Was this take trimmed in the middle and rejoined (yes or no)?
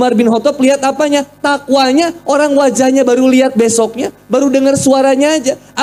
no